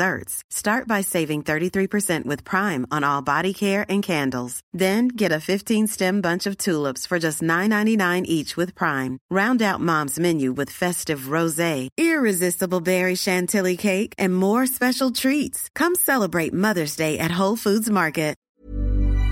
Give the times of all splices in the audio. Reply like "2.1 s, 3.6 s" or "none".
18.4 s